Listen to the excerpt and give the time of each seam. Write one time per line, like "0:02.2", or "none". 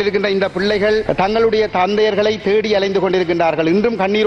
0:01.0